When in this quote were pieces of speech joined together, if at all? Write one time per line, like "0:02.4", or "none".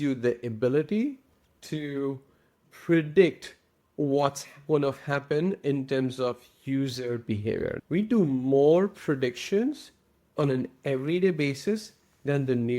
0:07.8